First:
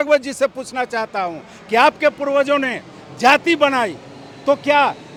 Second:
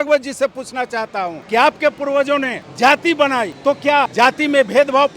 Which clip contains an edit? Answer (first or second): second